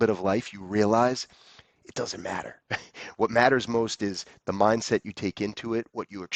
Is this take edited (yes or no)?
no